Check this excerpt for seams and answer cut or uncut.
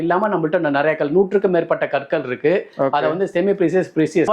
uncut